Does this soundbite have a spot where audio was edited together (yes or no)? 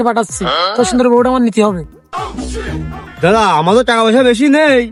no